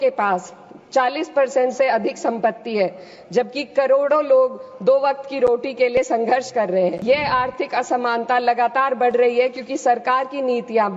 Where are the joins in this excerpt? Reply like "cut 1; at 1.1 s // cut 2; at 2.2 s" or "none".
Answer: cut 1; at 7.0 s